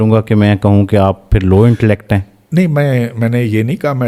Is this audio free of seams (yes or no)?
yes